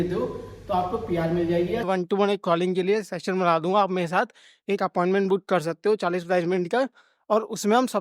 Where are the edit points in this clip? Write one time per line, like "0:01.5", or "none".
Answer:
0:01.8